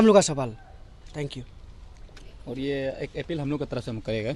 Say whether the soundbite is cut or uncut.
uncut